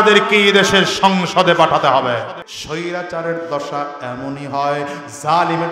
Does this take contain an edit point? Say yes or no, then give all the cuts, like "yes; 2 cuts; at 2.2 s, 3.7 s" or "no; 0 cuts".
yes; 1 cut; at 2.5 s